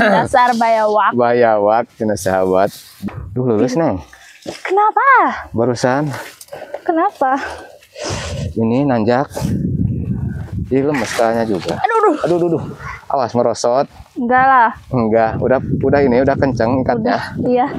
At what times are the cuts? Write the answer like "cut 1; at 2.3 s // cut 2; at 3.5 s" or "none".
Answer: cut 1; at 2.9 s

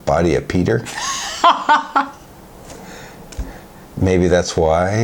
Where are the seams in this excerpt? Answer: none

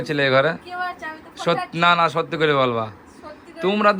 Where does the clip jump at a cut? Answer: none

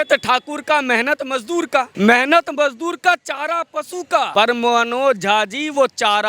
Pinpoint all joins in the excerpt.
cut 1; at 1.9 s // cut 2; at 4.3 s

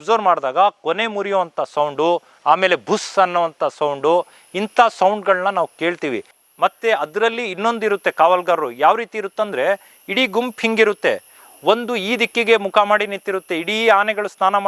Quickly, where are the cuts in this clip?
cut 1; at 2.3 s // cut 2; at 6.4 s

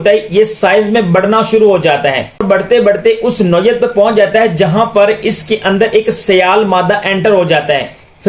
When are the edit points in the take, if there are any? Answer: cut 1; at 2.4 s

